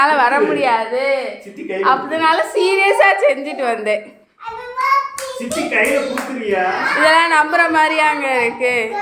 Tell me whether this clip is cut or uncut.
cut